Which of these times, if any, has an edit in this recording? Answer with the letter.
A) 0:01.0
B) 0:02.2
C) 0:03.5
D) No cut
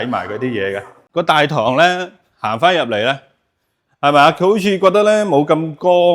A